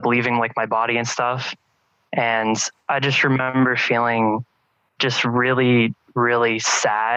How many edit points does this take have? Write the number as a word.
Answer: zero